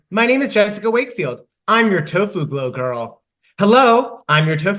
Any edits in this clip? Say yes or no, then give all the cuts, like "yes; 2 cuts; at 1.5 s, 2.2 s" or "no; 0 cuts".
no; 0 cuts